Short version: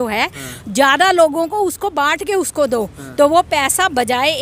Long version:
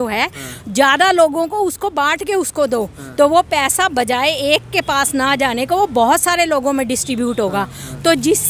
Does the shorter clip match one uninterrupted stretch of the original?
yes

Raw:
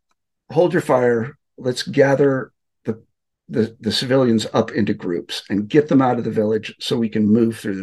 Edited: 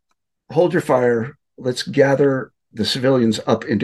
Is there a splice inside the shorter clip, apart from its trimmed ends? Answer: yes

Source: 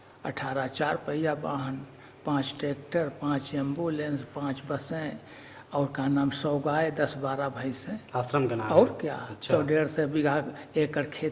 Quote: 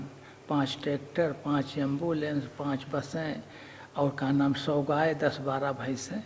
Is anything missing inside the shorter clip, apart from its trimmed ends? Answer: no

